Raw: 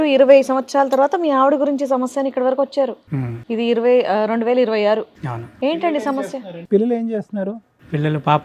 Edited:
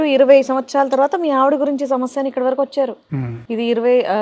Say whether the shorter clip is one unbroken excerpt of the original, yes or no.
yes